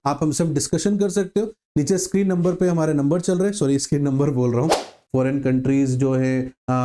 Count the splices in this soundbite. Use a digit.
1